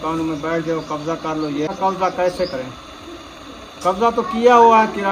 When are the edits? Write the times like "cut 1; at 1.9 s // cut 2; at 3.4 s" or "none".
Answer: cut 1; at 1.7 s